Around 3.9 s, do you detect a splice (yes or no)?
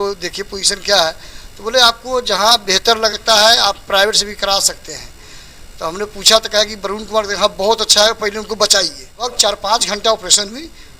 no